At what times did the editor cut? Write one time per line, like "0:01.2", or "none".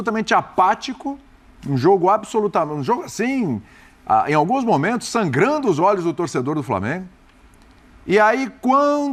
none